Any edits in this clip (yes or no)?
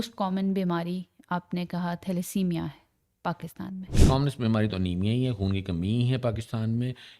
yes